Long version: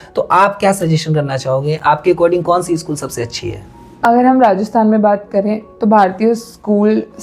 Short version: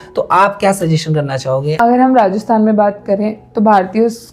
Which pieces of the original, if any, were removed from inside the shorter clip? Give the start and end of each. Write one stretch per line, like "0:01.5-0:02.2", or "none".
0:01.8-0:04.0